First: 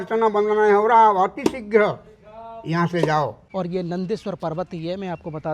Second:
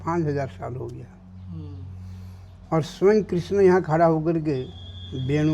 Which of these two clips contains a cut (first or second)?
first